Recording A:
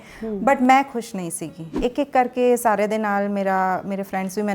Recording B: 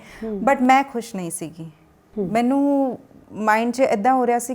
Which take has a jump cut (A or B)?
A